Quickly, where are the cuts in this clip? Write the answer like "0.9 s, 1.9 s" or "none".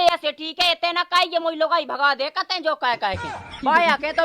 none